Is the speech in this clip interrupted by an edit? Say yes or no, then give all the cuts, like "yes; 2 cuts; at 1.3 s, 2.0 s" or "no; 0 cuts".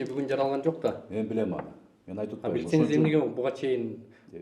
no; 0 cuts